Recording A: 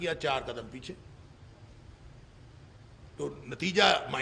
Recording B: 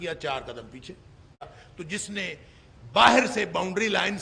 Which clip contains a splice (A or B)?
B